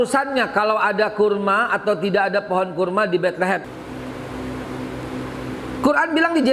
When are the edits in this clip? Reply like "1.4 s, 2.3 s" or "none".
3.6 s